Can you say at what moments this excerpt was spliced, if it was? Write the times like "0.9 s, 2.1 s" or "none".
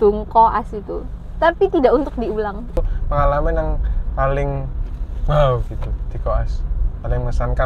2.8 s